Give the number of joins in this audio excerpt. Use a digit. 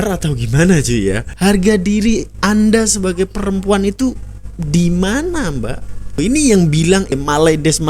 3